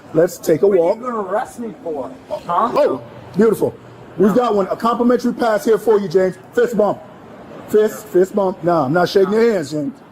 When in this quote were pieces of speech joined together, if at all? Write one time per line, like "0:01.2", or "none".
0:02.7